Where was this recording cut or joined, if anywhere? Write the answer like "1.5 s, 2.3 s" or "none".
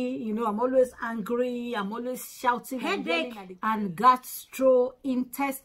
2.9 s

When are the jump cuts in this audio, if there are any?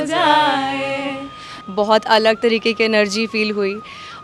1.5 s

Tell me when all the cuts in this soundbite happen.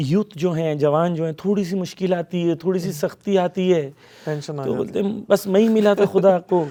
none

